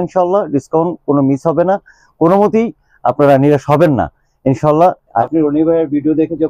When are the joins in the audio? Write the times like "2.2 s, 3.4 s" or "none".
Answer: 5.2 s